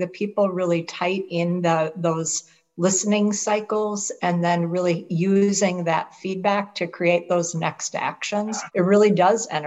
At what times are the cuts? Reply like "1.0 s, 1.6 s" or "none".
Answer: 8.6 s